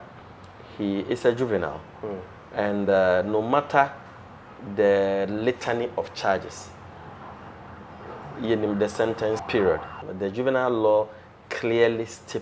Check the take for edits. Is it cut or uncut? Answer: cut